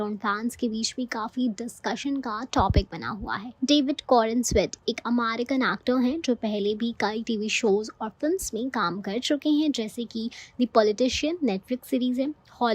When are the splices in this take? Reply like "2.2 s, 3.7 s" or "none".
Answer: 3.5 s

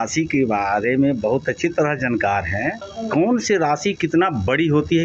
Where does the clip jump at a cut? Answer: 2.9 s

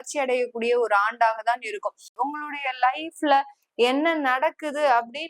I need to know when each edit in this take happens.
2.1 s

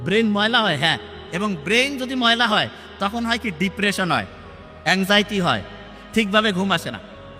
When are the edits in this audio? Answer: none

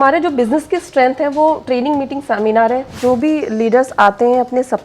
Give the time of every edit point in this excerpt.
3.0 s

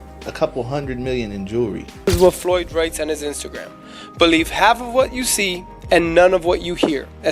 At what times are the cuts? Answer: 2.1 s

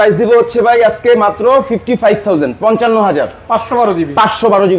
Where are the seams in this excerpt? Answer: none

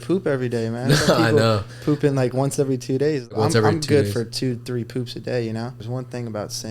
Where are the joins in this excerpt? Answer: 3.2 s, 5.8 s

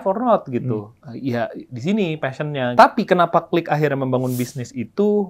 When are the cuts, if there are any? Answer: 0.9 s, 2.8 s

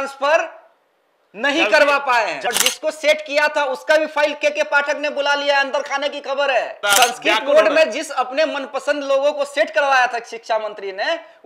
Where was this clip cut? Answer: 2.5 s, 6.8 s

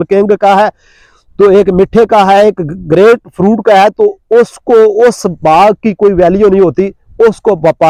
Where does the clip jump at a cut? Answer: none

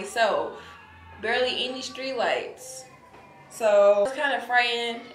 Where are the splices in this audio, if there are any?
4.1 s

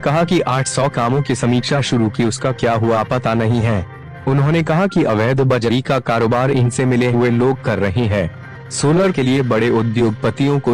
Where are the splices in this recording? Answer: 5.9 s

